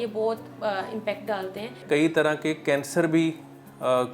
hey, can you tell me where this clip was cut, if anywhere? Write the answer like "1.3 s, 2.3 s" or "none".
1.8 s